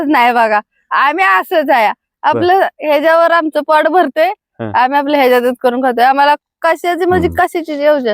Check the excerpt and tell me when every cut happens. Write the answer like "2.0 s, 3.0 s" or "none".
none